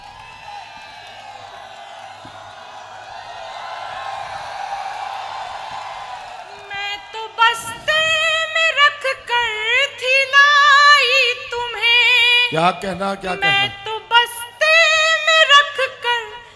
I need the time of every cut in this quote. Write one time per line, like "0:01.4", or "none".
0:06.9